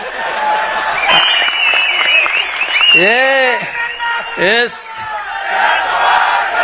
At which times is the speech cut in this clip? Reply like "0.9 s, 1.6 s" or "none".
1.1 s